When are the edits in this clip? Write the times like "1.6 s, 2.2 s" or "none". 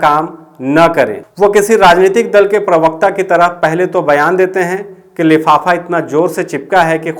1.2 s